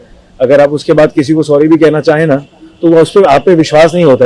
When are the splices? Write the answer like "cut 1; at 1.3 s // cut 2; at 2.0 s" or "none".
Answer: none